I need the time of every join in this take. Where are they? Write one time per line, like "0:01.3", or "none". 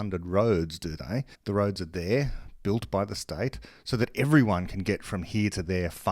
0:01.3